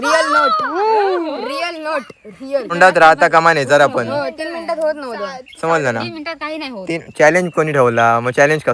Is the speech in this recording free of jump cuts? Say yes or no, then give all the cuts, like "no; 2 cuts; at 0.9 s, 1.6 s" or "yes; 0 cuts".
no; 1 cut; at 2.7 s